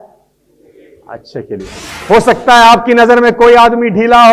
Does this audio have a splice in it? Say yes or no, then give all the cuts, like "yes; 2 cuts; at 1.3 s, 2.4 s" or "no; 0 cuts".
yes; 1 cut; at 1.9 s